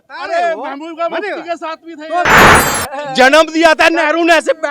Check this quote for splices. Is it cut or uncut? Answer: cut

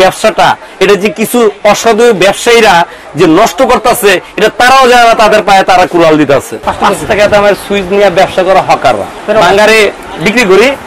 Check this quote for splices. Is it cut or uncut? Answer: cut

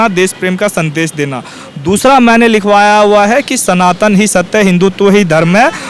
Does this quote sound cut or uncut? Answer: uncut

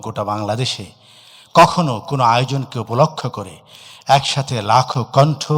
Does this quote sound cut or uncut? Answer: uncut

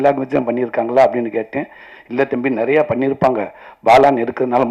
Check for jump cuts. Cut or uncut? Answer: uncut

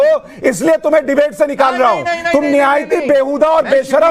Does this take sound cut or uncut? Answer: uncut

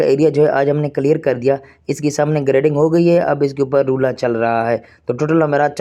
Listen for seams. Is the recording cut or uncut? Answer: uncut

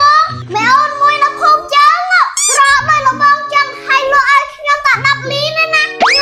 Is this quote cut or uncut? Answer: uncut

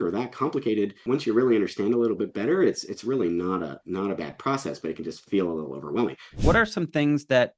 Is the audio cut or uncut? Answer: cut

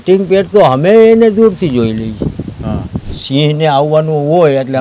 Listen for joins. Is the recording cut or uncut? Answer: cut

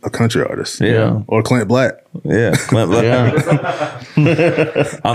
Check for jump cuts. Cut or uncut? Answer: cut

